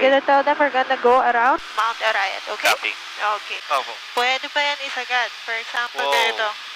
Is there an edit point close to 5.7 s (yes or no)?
no